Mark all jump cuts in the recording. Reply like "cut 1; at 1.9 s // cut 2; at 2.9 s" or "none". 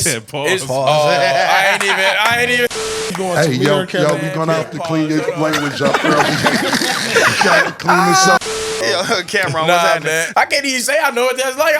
cut 1; at 8.8 s // cut 2; at 10.3 s

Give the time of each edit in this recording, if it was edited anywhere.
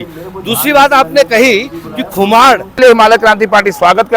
cut 1; at 2.8 s

